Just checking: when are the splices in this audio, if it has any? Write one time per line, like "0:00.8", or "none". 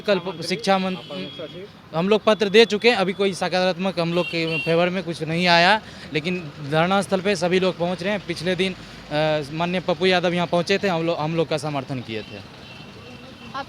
none

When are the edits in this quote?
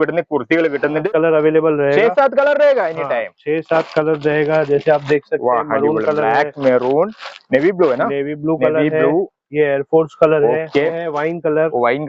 0:01.0
0:11.0

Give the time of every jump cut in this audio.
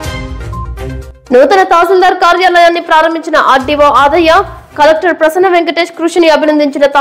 0:01.0

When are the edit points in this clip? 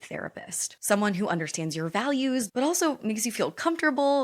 none

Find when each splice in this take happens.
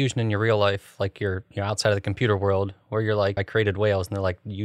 0:03.4

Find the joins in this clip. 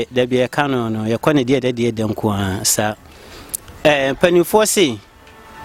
none

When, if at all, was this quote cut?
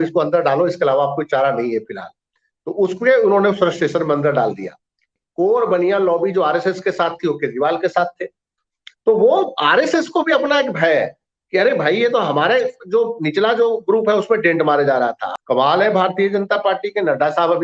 0:05.2
0:15.3

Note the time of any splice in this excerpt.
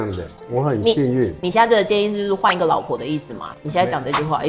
none

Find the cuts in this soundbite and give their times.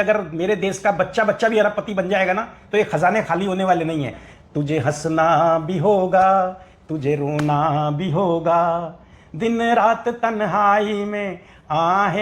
0:04.3

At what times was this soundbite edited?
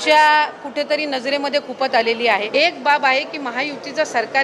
0:02.5

